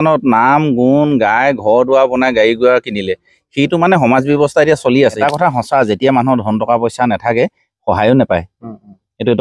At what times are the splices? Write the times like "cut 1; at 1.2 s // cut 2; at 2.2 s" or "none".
cut 1; at 5.2 s